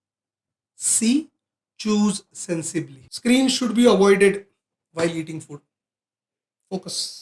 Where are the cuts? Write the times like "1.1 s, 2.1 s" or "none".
3.0 s